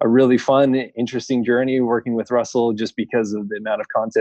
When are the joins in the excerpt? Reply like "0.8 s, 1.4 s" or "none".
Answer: none